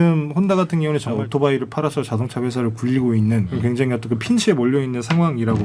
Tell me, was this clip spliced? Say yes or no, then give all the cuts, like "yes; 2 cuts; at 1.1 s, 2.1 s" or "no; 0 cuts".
yes; 2 cuts; at 1.2 s, 3.5 s